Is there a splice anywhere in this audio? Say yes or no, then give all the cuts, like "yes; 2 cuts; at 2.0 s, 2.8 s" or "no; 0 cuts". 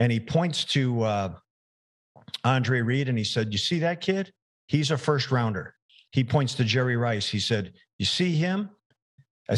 no; 0 cuts